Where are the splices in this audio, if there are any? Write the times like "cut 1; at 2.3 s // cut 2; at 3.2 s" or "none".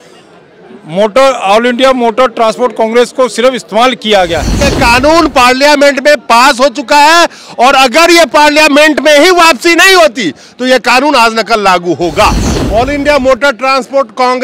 cut 1; at 4.7 s // cut 2; at 12.5 s